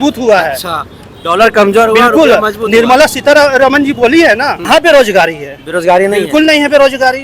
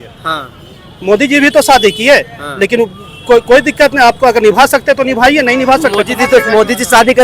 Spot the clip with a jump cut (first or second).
first